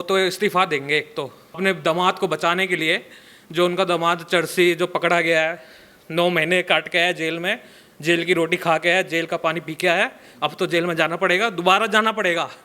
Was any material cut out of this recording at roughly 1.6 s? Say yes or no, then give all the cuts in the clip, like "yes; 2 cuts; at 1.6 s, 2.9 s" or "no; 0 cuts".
yes; 1 cut; at 1.6 s